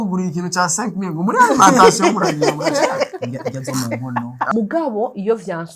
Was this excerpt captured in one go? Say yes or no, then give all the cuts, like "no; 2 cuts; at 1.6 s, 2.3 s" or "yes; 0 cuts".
no; 1 cut; at 4.5 s